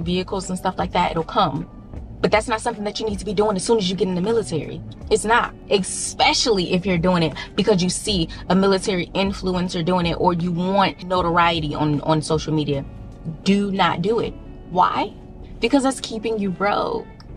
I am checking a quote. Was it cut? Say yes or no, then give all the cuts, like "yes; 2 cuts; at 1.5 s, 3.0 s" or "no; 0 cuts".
no; 0 cuts